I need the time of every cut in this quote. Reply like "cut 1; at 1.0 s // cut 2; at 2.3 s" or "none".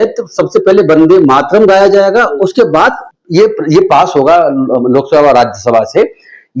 cut 1; at 3.0 s

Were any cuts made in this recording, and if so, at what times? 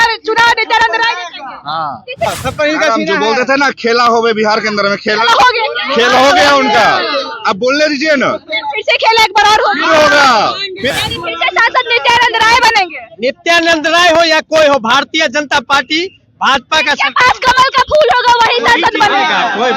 cut 1; at 2.3 s // cut 2; at 10.9 s

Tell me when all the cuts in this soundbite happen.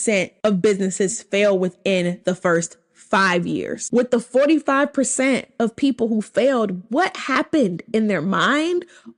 cut 1; at 3.8 s

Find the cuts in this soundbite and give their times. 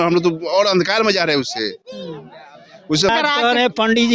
cut 1; at 3.1 s

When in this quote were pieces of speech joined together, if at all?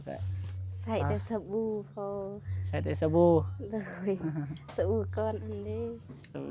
none

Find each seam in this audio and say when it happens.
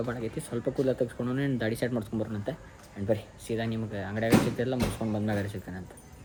none

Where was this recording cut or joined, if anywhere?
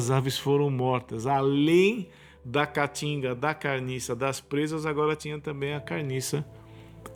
none

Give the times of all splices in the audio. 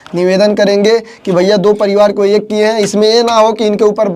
none

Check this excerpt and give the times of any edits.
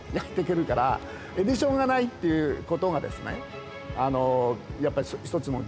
cut 1; at 1.2 s

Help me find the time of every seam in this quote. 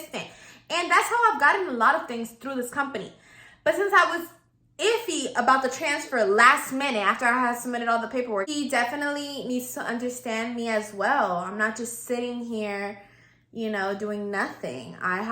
cut 1; at 8.5 s

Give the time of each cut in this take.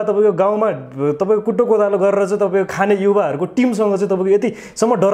none

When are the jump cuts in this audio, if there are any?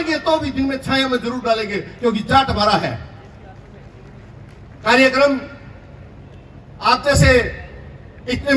none

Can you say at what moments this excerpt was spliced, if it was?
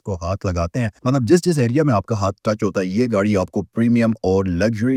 none

